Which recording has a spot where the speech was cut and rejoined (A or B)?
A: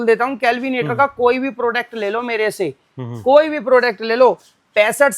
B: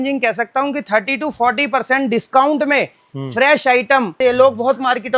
B